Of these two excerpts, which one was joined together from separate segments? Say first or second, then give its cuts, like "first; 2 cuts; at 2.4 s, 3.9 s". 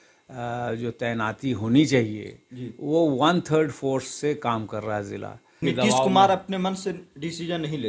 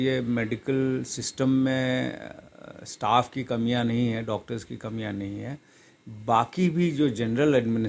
first; 1 cut; at 5.5 s